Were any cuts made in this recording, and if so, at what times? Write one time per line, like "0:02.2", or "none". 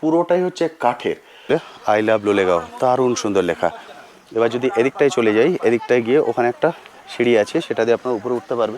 0:01.5